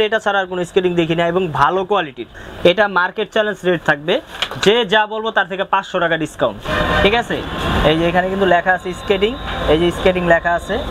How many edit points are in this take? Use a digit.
2